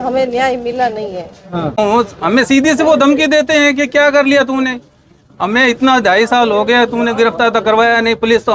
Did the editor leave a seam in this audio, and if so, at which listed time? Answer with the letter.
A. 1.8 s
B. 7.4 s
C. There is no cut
A